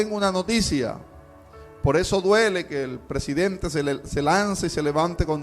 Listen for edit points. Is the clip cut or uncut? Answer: uncut